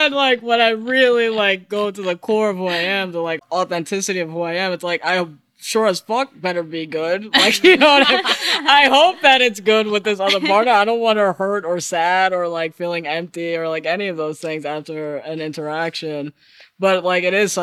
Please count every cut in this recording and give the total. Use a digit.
1